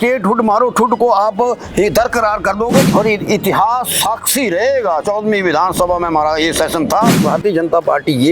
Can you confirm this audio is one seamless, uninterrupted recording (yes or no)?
no